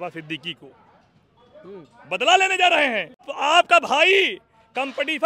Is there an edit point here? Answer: yes; 1 cut; at 3.3 s

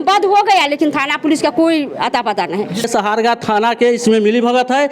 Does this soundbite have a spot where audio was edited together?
yes; 1 cut; at 2.9 s

